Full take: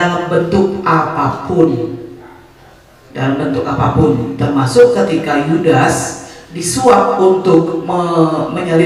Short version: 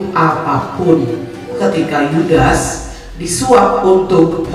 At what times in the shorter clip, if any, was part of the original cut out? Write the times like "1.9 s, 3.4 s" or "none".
1.6 s